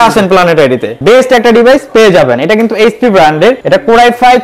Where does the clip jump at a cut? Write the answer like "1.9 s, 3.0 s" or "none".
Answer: 0.9 s, 3.6 s